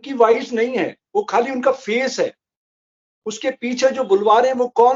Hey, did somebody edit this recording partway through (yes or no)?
no